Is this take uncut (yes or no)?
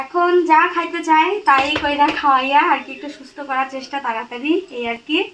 yes